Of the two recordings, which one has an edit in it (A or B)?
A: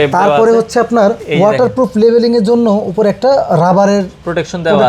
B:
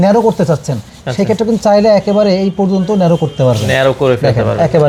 A